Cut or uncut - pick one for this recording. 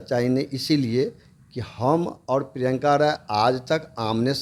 uncut